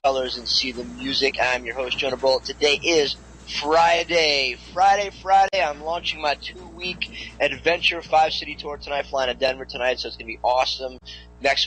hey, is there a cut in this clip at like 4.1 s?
no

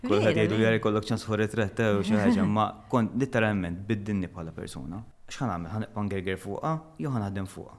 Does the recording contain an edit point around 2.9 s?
no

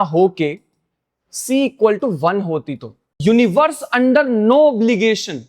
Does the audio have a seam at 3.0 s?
yes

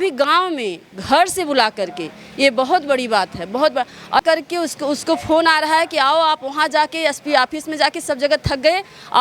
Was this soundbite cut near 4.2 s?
yes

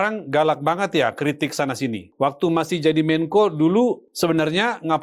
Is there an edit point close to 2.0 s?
yes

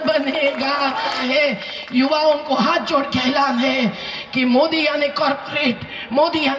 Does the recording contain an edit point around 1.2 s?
yes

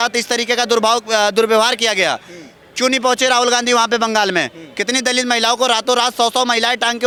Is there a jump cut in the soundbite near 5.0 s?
no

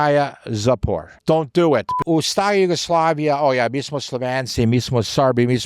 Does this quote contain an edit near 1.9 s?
yes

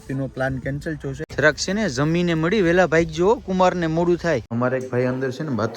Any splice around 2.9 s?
no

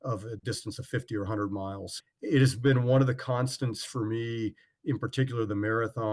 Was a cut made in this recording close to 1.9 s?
yes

